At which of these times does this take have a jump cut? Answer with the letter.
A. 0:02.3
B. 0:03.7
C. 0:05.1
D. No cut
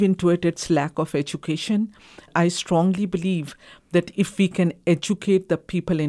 A